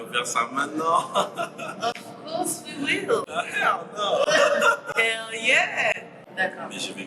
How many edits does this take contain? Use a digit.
1